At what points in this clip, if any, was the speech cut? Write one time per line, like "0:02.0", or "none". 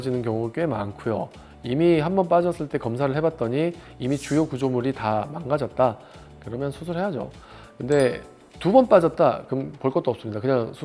none